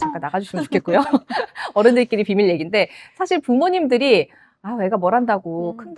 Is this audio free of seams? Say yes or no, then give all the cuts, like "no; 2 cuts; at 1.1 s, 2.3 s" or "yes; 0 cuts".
yes; 0 cuts